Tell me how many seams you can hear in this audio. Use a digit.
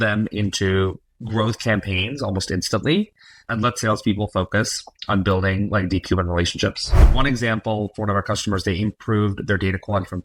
2